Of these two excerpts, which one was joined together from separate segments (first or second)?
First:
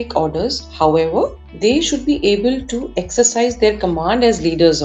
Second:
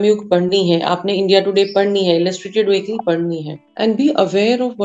second